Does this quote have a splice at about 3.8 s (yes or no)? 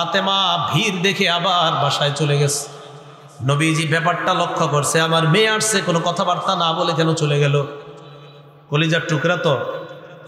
no